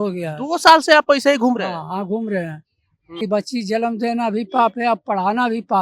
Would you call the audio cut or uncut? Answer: cut